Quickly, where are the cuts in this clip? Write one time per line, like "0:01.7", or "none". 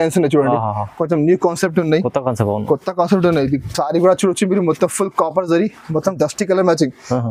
none